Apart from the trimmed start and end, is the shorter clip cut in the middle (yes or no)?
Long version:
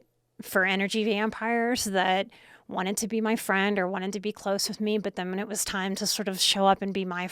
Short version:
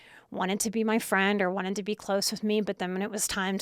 no